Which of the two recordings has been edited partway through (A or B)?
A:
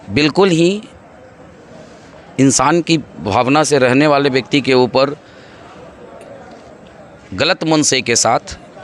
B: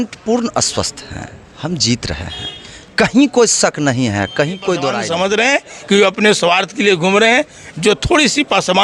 B